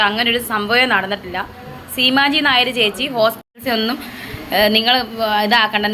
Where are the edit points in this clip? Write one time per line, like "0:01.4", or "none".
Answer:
0:03.5